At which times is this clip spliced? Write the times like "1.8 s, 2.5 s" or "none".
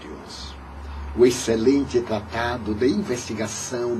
2.6 s